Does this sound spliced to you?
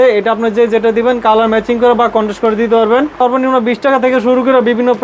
yes; 1 cut; at 3.2 s

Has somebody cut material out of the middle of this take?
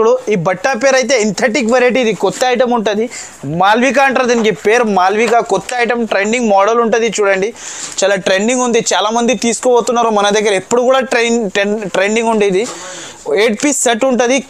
no; 0 cuts

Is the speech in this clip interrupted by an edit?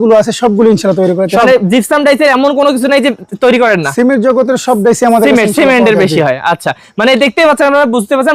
no; 0 cuts

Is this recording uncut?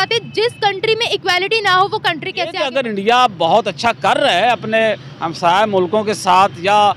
no; 1 cut; at 2.6 s

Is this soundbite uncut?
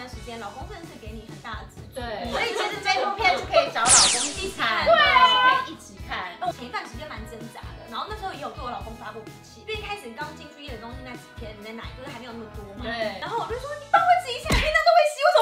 no; 1 cut; at 6.5 s

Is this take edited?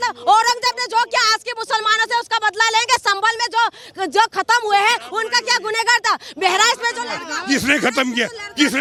no; 0 cuts

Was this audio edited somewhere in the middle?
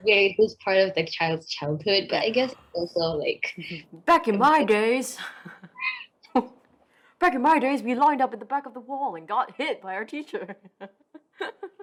no; 0 cuts

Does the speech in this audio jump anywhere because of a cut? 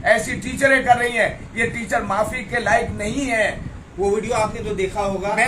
no; 0 cuts

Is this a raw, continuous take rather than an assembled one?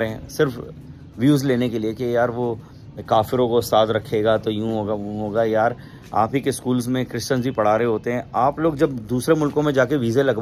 yes; 0 cuts

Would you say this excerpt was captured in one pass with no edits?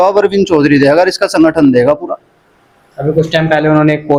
yes; 0 cuts

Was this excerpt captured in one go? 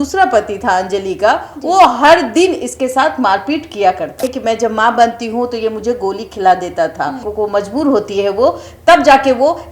no; 2 cuts; at 4.2 s, 7.2 s

